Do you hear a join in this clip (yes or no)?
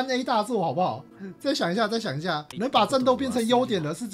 no